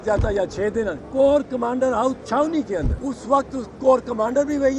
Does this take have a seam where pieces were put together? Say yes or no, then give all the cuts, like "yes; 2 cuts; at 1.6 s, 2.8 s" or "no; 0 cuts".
yes; 2 cuts; at 1.0 s, 2.9 s